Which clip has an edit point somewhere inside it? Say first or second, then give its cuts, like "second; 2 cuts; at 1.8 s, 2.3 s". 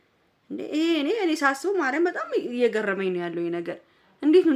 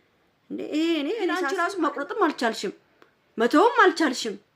second; 1 cut; at 1.5 s